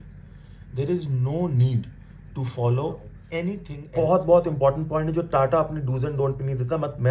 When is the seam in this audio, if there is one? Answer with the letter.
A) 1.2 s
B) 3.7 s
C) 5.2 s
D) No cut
B